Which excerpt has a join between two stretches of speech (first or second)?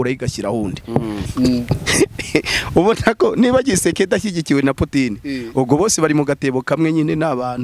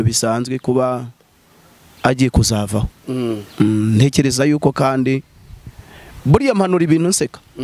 first